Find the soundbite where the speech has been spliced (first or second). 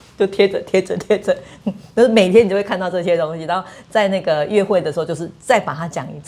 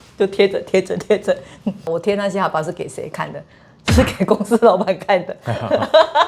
second